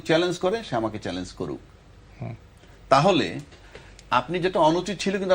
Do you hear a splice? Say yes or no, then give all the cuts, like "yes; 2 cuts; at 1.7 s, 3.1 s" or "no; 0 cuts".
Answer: no; 0 cuts